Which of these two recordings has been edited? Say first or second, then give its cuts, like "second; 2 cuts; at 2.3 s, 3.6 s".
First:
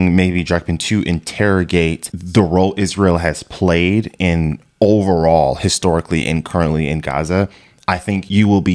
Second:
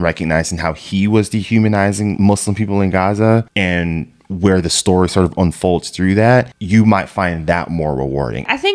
second; 1 cut; at 2.1 s